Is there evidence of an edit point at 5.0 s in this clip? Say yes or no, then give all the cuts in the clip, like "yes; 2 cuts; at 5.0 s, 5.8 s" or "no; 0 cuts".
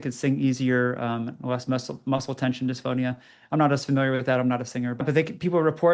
yes; 1 cut; at 5.0 s